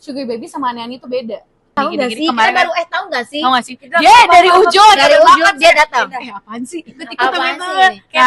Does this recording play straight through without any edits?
no; 1 cut; at 1.7 s

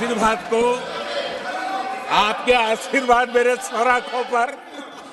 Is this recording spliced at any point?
no; 0 cuts

